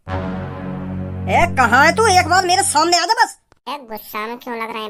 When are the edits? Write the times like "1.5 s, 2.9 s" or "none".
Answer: none